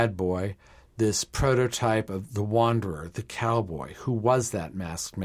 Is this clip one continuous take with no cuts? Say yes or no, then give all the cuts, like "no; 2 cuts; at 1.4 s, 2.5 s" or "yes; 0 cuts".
yes; 0 cuts